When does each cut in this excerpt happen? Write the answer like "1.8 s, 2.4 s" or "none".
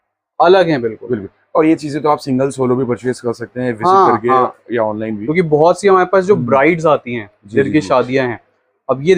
none